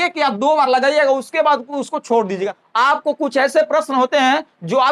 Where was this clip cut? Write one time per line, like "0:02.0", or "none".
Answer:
0:02.6